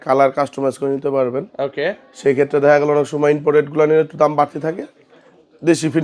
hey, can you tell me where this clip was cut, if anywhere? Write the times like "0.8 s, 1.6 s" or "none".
none